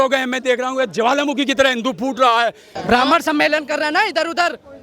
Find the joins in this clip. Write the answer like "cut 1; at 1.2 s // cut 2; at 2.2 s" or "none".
cut 1; at 2.7 s